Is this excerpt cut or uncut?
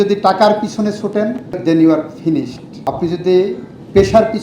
cut